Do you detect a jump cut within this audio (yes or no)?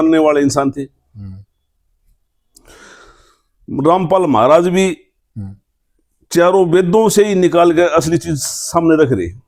no